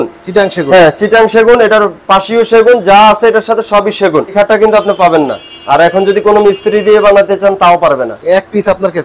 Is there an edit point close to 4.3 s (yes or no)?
yes